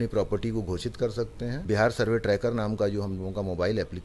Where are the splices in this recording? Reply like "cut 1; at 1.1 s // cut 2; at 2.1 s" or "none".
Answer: cut 1; at 1.6 s